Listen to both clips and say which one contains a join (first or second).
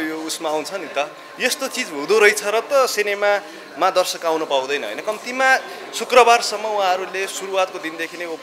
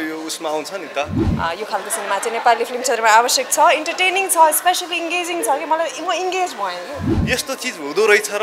second